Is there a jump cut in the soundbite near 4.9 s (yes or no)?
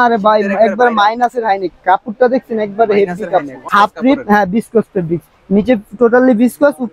no